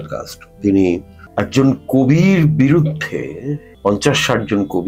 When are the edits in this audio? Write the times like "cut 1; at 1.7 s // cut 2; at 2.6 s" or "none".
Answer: cut 1; at 1.2 s // cut 2; at 3.7 s